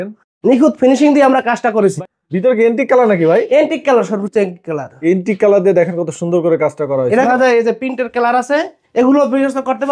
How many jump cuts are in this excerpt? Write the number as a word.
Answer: two